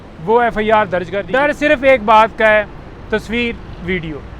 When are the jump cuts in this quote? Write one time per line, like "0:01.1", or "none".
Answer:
0:01.2